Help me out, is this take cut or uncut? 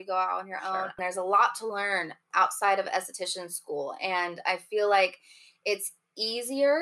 cut